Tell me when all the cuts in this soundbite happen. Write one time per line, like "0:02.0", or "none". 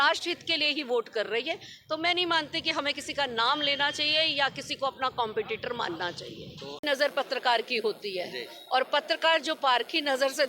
0:06.8